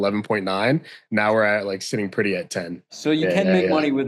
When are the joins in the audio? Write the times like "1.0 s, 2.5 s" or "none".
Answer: 2.9 s